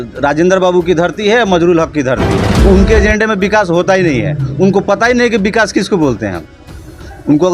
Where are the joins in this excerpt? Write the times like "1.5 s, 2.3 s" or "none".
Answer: 2.6 s